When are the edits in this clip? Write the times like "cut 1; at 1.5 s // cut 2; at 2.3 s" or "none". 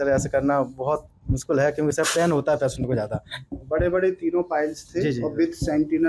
none